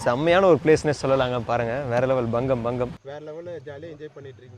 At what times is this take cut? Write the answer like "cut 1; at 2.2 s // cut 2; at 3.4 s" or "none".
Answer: none